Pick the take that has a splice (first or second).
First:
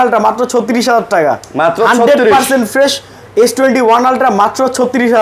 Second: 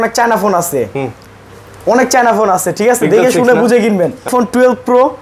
second